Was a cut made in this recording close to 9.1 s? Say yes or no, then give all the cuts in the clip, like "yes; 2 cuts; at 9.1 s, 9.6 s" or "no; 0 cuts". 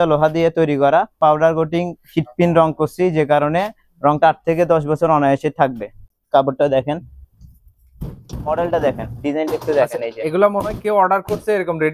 no; 2 cuts; at 1.2 s, 6.1 s